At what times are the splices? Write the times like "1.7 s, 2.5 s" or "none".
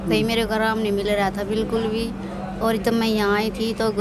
none